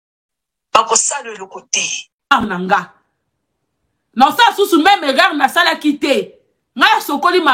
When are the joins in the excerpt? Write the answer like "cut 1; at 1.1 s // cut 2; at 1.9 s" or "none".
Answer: cut 1; at 2.3 s